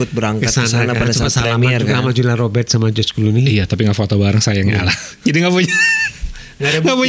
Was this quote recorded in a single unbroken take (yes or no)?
yes